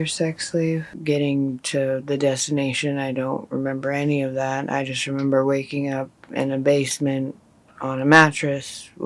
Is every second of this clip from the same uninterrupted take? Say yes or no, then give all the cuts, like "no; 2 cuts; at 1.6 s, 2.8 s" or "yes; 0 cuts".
no; 1 cut; at 0.9 s